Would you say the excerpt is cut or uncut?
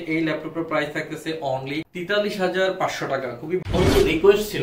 cut